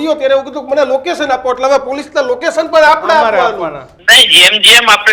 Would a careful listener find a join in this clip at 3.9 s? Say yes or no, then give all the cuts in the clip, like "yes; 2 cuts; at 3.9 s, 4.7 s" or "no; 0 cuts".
yes; 1 cut; at 3.9 s